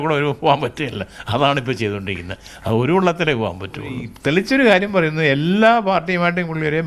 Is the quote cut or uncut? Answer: cut